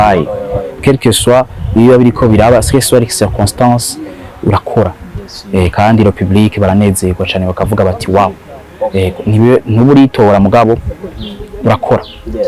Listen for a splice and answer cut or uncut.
uncut